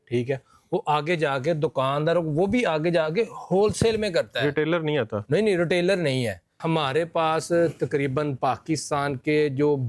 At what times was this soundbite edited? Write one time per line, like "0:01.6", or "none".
0:06.6